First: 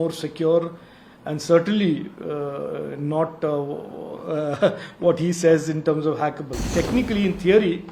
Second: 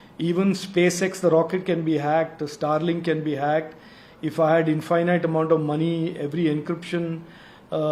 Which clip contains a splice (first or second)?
first